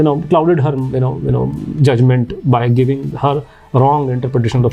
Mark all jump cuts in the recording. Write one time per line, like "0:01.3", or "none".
none